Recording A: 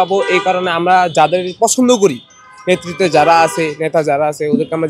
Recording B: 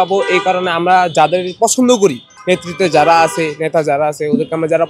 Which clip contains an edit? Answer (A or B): B